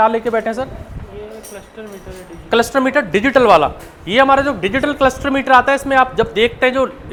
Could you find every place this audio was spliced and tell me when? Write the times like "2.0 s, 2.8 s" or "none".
none